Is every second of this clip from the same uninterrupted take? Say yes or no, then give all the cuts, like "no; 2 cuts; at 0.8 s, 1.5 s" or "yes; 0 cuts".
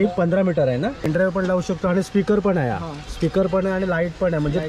no; 1 cut; at 1.1 s